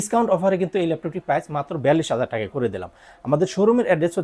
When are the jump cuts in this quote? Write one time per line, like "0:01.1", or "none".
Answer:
none